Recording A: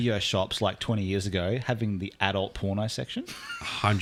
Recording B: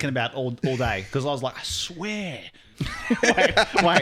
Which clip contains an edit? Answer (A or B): B